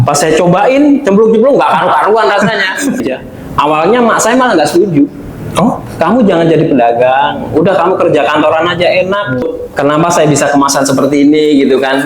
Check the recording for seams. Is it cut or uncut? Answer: cut